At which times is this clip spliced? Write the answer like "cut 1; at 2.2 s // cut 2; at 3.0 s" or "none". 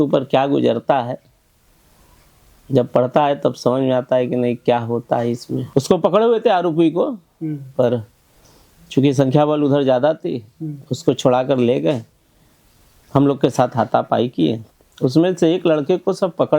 cut 1; at 5.5 s